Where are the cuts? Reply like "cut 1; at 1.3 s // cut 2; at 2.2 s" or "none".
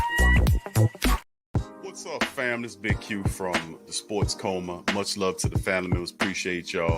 cut 1; at 1.2 s